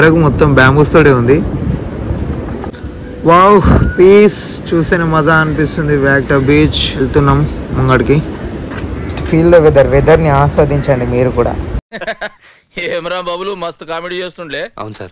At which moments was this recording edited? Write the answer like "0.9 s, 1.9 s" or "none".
none